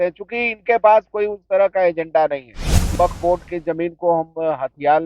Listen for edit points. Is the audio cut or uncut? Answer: cut